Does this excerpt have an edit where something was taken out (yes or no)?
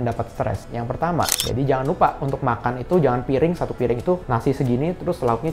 yes